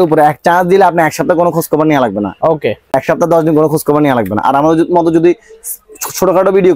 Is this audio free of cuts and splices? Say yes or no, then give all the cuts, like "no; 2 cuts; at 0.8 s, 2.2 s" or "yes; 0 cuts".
yes; 0 cuts